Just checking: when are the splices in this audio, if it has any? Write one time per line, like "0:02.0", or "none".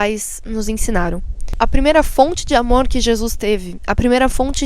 0:01.4